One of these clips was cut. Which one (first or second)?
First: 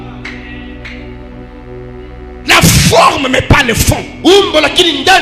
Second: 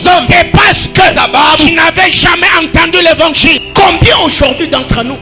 second